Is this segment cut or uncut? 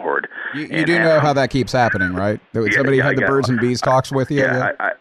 cut